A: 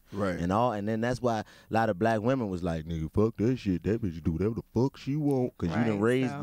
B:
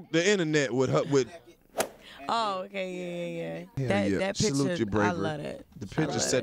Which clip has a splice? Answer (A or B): B